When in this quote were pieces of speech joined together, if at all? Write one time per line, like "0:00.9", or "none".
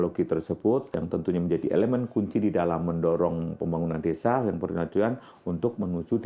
0:00.9